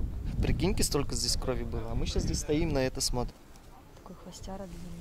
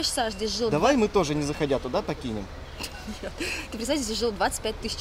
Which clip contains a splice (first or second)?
first